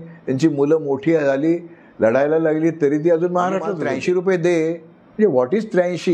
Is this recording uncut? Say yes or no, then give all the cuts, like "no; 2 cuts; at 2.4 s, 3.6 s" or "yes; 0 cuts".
no; 1 cut; at 3.8 s